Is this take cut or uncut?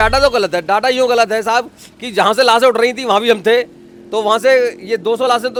uncut